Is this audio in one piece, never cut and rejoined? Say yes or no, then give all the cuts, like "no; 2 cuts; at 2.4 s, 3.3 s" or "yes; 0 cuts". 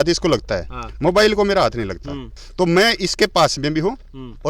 yes; 0 cuts